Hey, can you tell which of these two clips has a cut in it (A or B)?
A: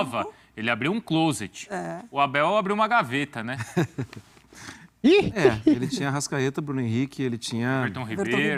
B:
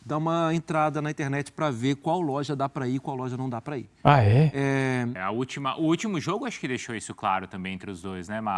B